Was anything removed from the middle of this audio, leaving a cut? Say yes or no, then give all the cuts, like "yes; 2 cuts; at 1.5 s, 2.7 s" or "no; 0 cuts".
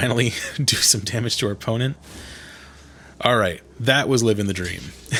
no; 0 cuts